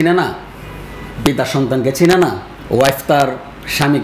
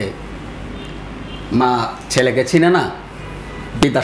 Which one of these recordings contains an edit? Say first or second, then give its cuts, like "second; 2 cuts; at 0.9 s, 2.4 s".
first; 1 cut; at 2.5 s